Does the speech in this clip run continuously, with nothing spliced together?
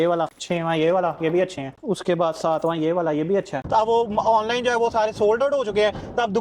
no; 1 cut; at 3.6 s

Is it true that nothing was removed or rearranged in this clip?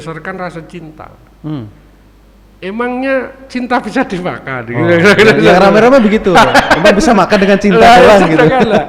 yes; 0 cuts

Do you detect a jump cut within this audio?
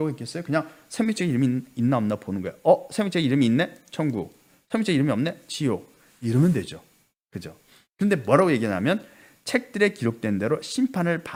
no; 0 cuts

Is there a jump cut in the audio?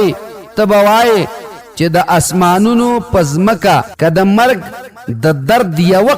yes; 1 cut; at 3.9 s

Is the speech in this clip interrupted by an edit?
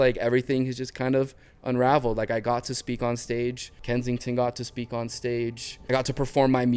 yes; 2 cuts; at 3.7 s, 5.7 s

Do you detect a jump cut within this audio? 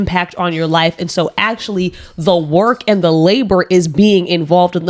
no; 0 cuts

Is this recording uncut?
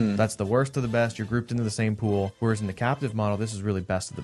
no; 1 cut; at 2.3 s

